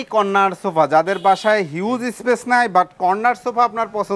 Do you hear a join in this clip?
no; 0 cuts

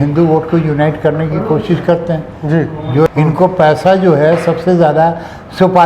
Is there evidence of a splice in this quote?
yes; 1 cut; at 3.1 s

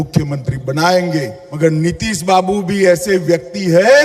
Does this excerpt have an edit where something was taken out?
yes; 1 cut; at 1.4 s

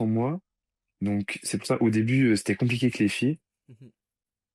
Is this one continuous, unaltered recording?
yes; 0 cuts

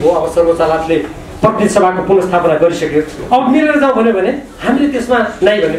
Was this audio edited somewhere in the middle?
no; 0 cuts

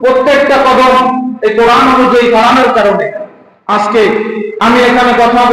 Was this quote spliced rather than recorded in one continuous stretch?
no; 0 cuts

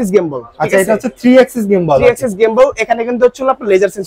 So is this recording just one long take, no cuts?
yes; 0 cuts

